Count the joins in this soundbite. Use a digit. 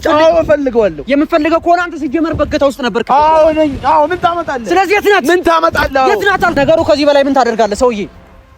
1